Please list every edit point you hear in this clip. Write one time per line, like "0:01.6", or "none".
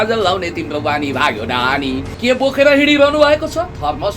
0:02.1